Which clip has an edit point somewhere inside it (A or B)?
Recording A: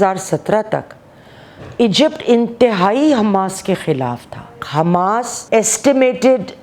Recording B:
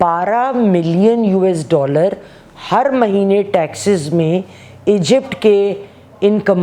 A